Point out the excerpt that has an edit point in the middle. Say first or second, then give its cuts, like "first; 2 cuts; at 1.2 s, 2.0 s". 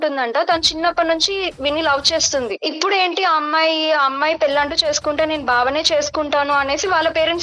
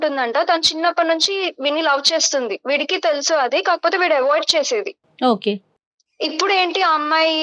first; 1 cut; at 2.6 s